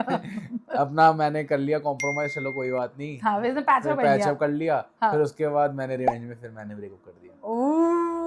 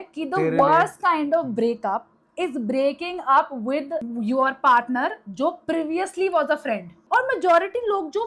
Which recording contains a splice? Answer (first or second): second